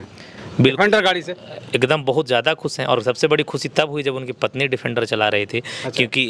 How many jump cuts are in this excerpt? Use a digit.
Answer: 0